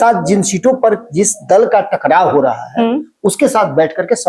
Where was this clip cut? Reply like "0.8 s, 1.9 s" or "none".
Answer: none